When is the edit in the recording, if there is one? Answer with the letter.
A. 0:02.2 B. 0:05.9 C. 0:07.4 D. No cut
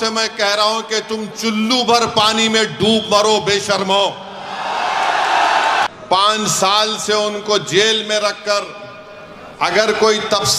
B